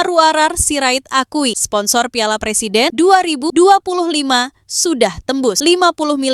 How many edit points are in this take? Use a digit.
0